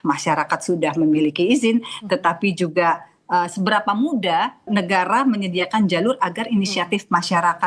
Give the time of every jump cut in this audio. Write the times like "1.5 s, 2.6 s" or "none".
4.7 s

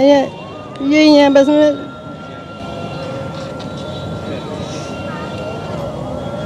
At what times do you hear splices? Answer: none

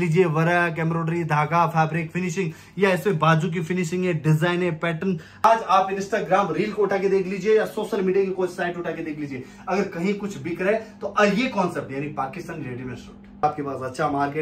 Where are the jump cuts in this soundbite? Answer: 3.6 s, 5.4 s, 13.4 s

